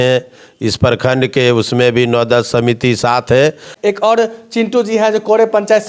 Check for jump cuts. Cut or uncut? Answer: cut